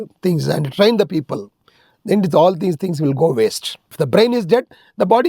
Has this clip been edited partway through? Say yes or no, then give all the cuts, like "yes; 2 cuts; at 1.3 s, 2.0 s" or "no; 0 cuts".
yes; 1 cut; at 3.8 s